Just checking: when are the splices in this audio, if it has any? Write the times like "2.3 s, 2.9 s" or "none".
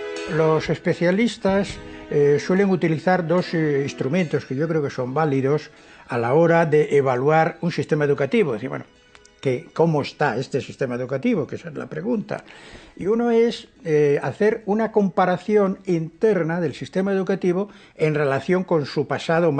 16.4 s